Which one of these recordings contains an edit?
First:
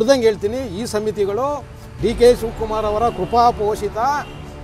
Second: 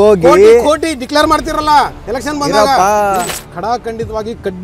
second; 1 cut; at 3.3 s

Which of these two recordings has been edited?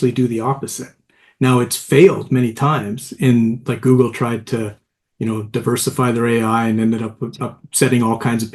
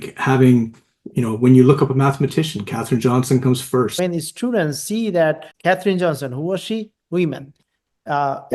second; 2 cuts; at 3.9 s, 5.5 s

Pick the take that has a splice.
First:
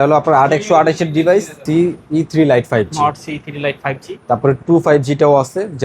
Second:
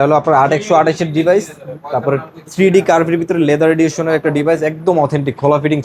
first; 1 cut; at 1.6 s

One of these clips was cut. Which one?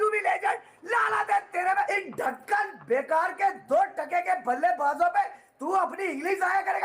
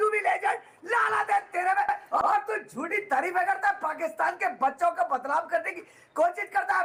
first; 1 cut; at 1.9 s

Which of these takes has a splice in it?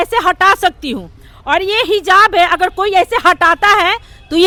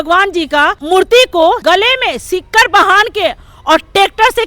second; 2 cuts; at 0.8 s, 1.6 s

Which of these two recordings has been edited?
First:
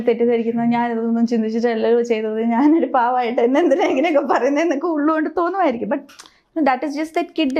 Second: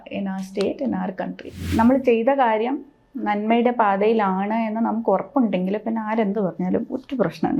second; 1 cut; at 1.7 s

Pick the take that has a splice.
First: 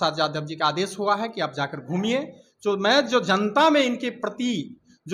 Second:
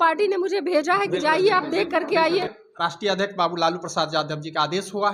second; 1 cut; at 2.6 s

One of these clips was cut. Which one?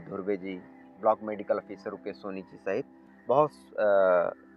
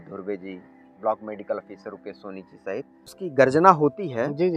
second; 1 cut; at 3.1 s

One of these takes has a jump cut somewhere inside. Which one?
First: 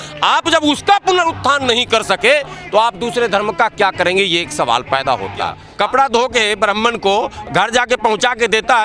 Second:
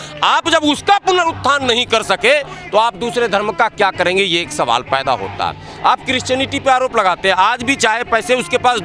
first; 1 cut; at 5.6 s

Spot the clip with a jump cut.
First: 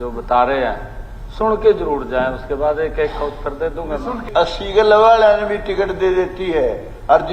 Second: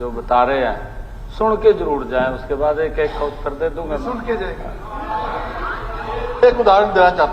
first; 1 cut; at 4.2 s

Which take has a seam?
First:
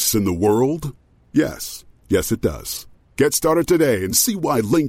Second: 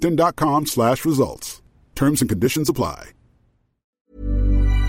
second; 1 cut; at 4.0 s

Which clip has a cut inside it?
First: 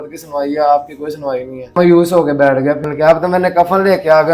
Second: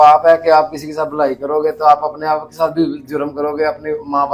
first; 2 cuts; at 1.8 s, 2.8 s

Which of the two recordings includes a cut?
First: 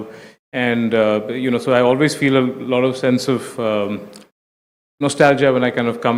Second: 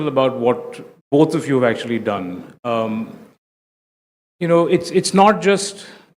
second; 1 cut; at 1.8 s

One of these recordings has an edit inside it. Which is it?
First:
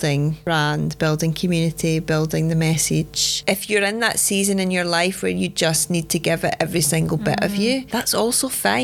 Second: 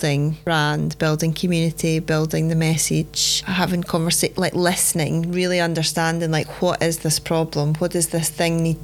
first; 2 cuts; at 3.3 s, 7.9 s

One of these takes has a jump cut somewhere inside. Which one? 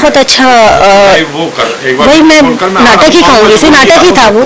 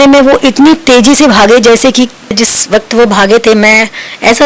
second; 1 cut; at 2.5 s

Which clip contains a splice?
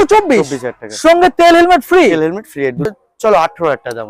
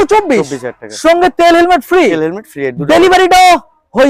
first; 1 cut; at 2.9 s

